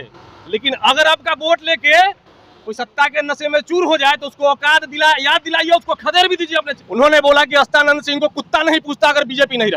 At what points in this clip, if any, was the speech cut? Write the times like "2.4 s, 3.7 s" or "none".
6.8 s